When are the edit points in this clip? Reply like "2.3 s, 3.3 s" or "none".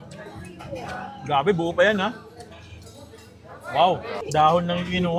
4.2 s